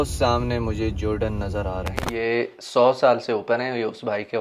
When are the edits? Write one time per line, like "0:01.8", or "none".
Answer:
0:02.0